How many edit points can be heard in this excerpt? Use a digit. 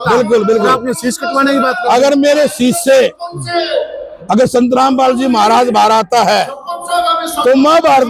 0